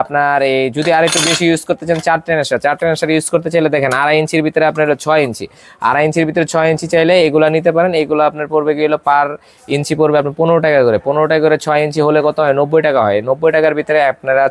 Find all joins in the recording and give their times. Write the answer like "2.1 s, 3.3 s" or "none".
none